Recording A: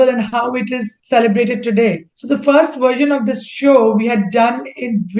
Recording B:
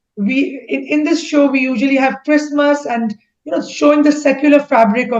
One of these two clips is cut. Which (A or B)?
A